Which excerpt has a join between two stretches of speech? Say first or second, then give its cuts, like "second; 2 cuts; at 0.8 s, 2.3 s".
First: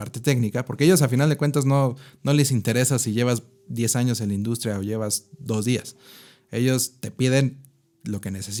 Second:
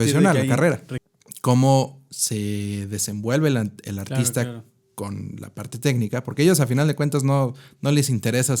second; 1 cut; at 0.9 s